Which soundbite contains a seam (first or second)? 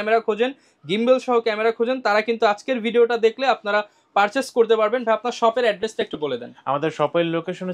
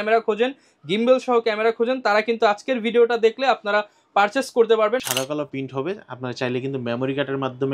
second